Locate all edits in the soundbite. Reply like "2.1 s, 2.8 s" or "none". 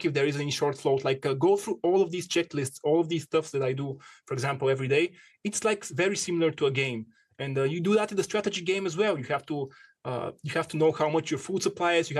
none